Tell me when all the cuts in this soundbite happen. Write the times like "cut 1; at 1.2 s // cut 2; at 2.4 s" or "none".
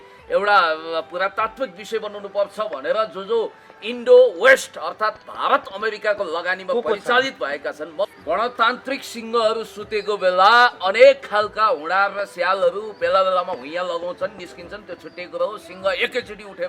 cut 1; at 8.1 s

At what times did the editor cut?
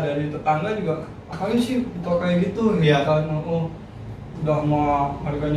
none

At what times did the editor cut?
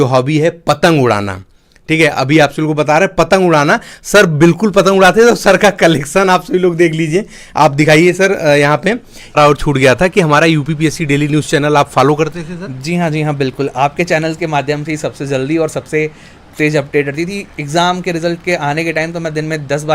cut 1; at 9.1 s

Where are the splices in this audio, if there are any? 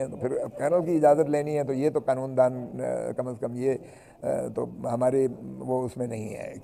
none

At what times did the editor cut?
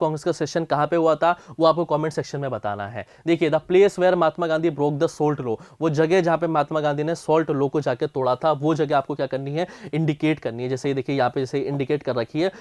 none

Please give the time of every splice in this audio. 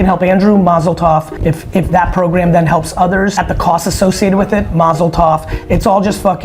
cut 1; at 1.3 s // cut 2; at 3.3 s

